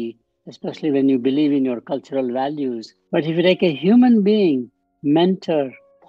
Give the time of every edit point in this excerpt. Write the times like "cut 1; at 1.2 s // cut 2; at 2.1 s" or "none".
cut 1; at 3.0 s